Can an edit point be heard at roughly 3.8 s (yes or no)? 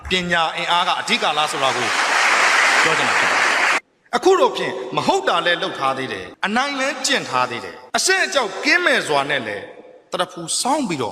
yes